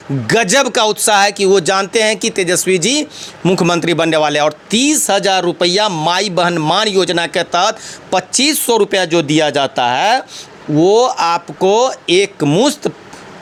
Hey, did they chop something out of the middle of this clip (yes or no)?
no